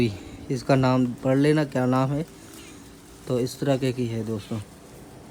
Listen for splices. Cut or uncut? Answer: uncut